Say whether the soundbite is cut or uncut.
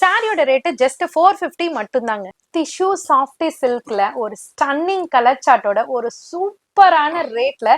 cut